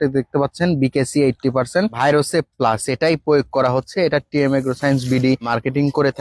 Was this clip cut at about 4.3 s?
no; 0 cuts

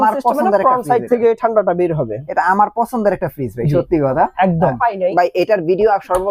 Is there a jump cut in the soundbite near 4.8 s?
yes; 1 cut; at 4.8 s

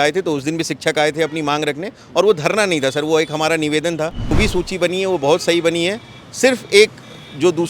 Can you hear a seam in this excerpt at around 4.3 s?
yes; 1 cut; at 4.3 s

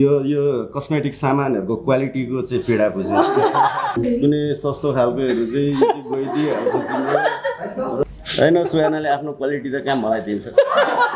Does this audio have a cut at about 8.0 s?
yes; 2 cuts; at 4.0 s, 8.0 s

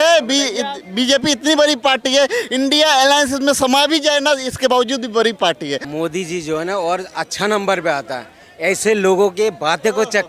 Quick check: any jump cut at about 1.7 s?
no; 1 cut; at 5.9 s

